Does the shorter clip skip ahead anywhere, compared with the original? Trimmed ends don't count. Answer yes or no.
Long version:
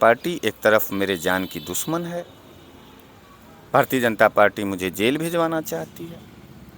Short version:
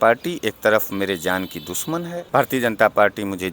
yes